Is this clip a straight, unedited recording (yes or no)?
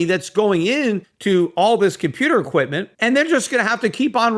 no